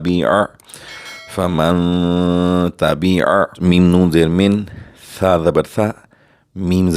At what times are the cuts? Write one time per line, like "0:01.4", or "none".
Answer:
0:03.5

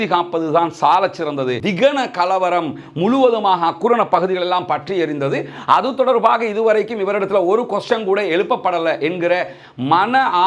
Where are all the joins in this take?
0:01.6

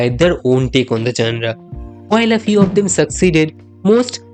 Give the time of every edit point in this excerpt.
none

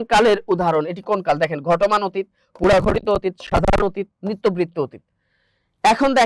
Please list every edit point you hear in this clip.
none

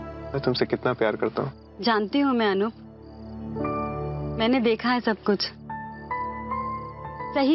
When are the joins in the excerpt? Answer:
0:01.6

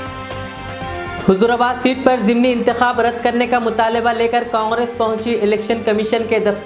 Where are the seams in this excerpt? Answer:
none

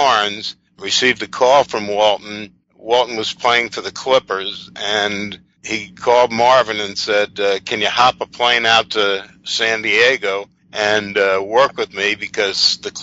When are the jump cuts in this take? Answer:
none

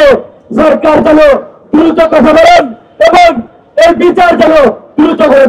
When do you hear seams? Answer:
none

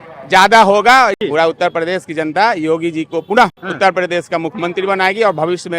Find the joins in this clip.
0:01.2
0:03.6

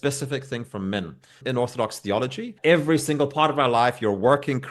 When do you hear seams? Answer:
0:01.4
0:02.5

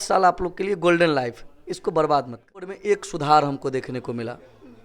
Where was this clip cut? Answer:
0:02.7

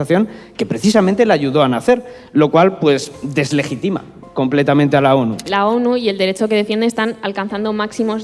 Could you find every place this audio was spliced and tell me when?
0:05.5

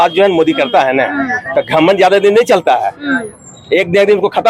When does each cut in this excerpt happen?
none

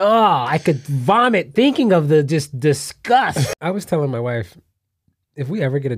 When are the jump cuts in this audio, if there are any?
0:03.5

